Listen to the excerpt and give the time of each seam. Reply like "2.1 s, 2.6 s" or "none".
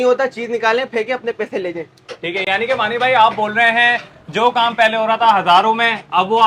none

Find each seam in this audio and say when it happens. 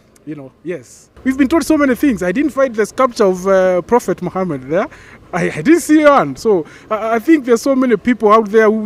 1.1 s

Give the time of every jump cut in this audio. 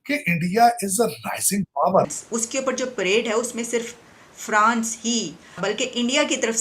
2.1 s, 5.6 s

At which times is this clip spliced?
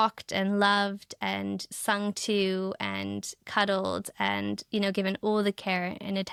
none

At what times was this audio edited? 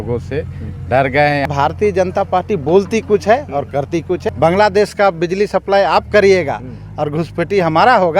1.5 s, 4.2 s

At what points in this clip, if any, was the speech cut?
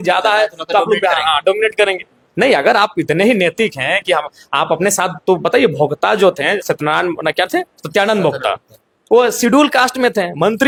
none

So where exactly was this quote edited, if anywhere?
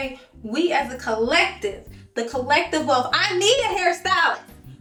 none

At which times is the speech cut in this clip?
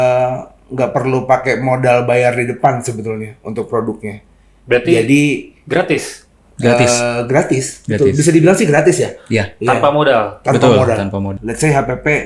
11.4 s

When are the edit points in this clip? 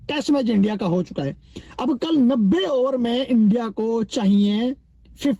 none

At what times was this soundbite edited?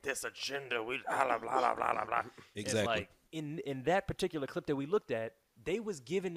3.2 s, 5.5 s

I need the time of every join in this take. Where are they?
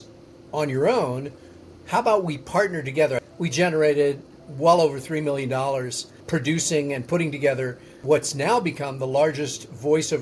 3.3 s, 4.3 s, 6.1 s, 8.0 s

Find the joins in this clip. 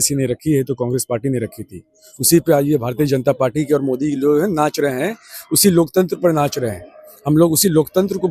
none

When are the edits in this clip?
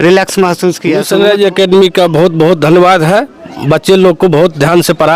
0.9 s

